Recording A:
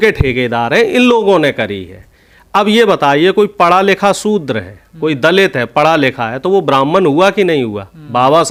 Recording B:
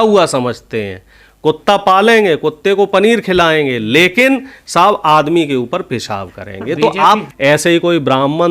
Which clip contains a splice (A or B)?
B